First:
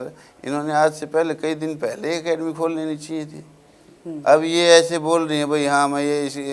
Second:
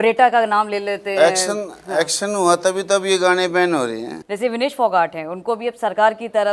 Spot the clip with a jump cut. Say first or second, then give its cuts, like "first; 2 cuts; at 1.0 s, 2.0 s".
second; 1 cut; at 4.2 s